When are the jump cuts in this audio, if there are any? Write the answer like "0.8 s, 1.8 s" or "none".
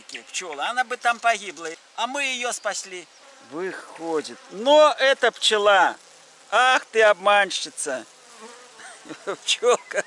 1.8 s, 3.1 s